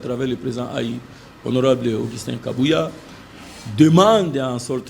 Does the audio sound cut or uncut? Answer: uncut